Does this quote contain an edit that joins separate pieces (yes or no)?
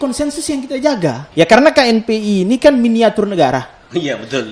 yes